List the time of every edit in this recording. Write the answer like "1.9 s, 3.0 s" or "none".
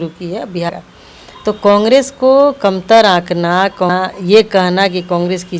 0.7 s, 3.9 s